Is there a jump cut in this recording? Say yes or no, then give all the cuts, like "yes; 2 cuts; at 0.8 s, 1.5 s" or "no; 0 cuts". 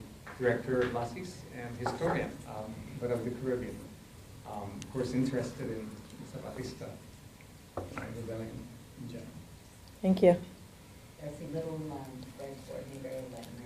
yes; 1 cut; at 9.0 s